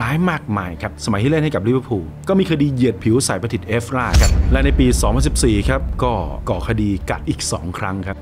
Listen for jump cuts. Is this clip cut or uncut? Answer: cut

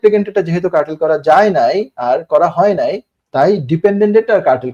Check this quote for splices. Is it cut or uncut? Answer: uncut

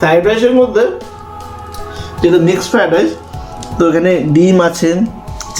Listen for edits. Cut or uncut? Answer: uncut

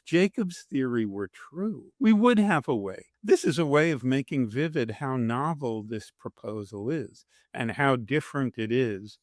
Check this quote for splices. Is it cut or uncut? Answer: cut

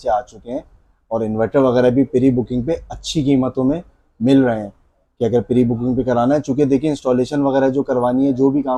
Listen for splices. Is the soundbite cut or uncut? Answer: uncut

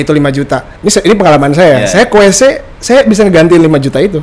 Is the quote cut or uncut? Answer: uncut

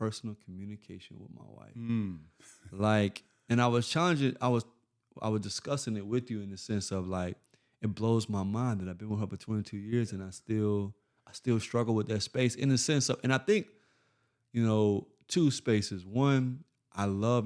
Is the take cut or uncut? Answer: uncut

